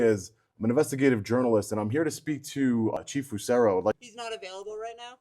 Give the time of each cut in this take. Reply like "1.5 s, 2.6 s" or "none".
2.9 s, 4.0 s